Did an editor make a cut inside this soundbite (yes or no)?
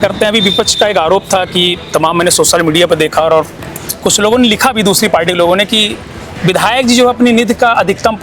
no